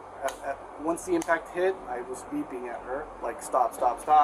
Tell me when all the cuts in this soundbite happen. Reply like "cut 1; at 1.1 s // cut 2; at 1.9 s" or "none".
cut 1; at 3.1 s